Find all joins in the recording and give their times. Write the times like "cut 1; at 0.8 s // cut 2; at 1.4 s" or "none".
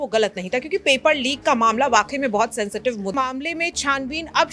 cut 1; at 3.1 s